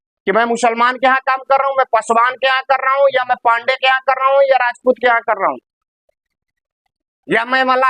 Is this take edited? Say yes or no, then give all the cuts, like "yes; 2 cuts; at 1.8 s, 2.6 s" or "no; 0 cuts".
no; 0 cuts